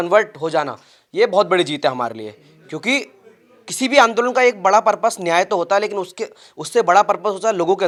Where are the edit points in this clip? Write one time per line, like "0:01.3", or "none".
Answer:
none